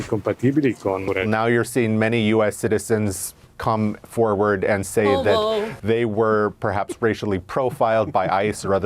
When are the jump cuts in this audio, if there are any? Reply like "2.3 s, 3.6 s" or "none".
1.0 s